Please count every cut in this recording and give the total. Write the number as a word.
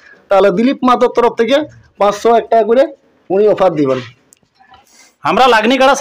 one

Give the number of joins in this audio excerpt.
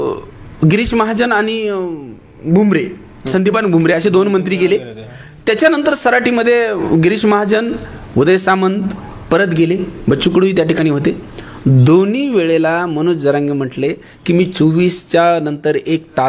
zero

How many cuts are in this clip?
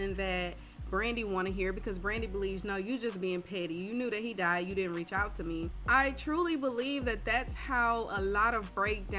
one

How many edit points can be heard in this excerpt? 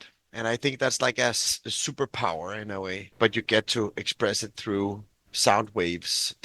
one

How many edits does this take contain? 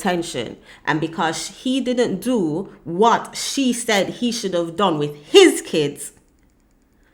zero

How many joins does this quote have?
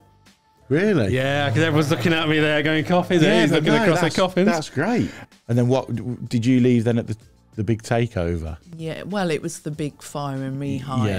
one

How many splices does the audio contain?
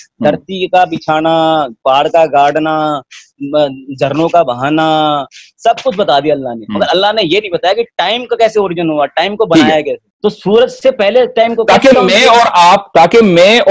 one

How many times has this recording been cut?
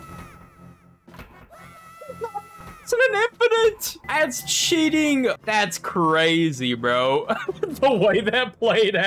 two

